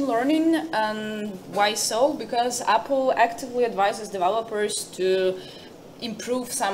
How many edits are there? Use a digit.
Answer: 0